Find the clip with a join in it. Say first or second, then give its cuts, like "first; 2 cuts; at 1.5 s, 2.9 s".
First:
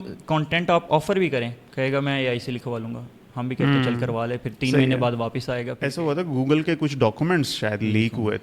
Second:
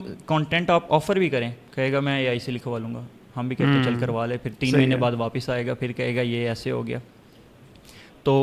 first; 1 cut; at 5.8 s